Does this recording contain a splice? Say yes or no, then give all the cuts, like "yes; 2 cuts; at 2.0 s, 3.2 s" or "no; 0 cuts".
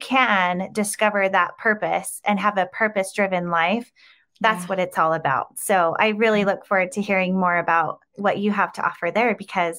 yes; 1 cut; at 8.0 s